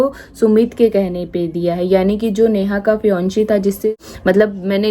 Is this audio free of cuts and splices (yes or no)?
no